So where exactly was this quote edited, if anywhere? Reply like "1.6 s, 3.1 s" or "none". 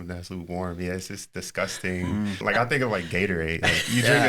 2.4 s